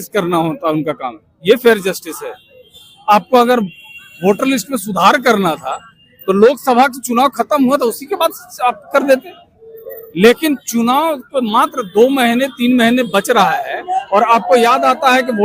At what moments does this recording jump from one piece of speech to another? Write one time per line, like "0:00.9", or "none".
none